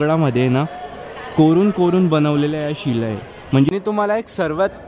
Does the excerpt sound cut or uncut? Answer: cut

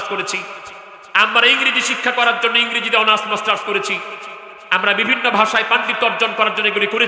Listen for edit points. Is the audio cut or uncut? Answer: uncut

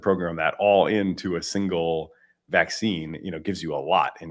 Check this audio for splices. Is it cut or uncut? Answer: uncut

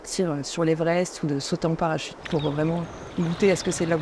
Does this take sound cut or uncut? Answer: uncut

